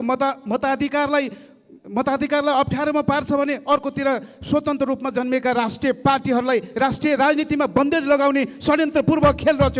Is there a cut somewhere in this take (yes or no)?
no